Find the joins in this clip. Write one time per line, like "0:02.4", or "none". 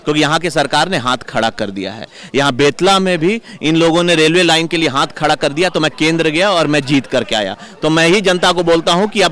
none